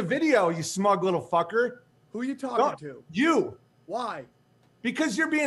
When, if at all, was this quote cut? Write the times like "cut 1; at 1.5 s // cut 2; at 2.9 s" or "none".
cut 1; at 2.6 s